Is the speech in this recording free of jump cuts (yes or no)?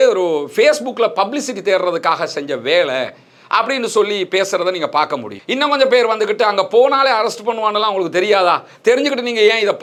yes